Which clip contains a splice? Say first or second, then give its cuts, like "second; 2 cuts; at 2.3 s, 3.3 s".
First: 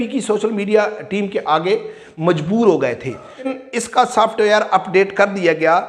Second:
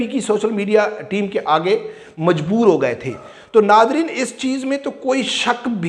first; 1 cut; at 3.5 s